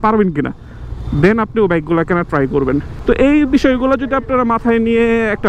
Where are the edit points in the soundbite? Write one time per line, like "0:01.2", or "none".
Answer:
0:02.9